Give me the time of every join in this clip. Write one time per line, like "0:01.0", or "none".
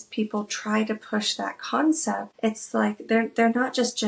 0:02.3